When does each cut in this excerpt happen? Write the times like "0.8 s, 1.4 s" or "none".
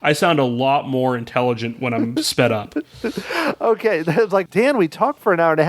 4.5 s